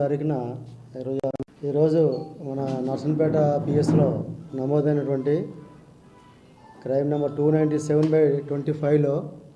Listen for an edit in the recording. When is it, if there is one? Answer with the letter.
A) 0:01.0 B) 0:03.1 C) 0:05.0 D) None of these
A